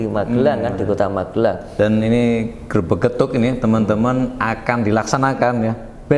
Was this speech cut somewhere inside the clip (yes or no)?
yes